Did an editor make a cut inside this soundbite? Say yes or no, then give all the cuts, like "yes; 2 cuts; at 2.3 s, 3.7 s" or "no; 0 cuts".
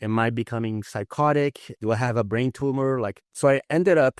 yes; 2 cuts; at 1.7 s, 3.2 s